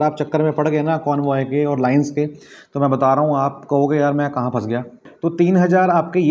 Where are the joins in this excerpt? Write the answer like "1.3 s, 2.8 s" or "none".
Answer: 5.1 s